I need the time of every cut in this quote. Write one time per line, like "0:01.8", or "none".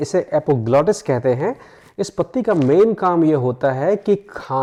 none